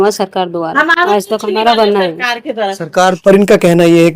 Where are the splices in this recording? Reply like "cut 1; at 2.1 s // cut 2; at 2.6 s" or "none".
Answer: cut 1; at 3.2 s